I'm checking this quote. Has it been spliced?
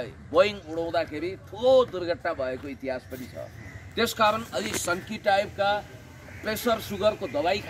no; 0 cuts

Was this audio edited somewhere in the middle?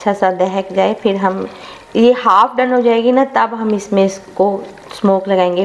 no; 0 cuts

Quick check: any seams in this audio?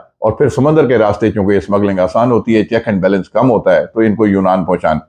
no; 0 cuts

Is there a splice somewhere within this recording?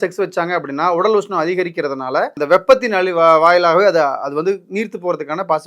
yes; 1 cut; at 2.3 s

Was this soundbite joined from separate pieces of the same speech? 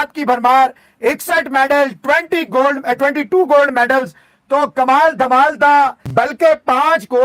no; 0 cuts

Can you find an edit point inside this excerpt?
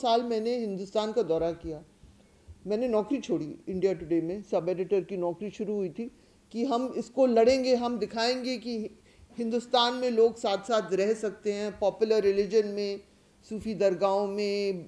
no; 0 cuts

